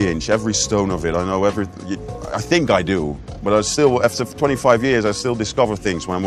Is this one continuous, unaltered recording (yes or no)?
yes